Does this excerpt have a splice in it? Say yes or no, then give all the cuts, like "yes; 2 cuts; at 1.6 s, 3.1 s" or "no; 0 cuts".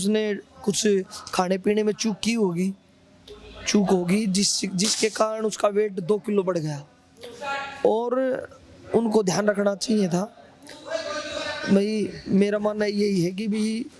no; 0 cuts